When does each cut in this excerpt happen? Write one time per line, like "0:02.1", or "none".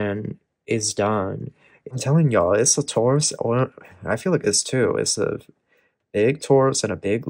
0:01.9